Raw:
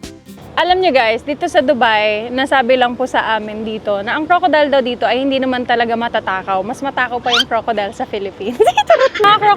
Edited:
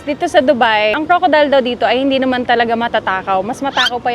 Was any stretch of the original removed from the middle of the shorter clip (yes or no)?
yes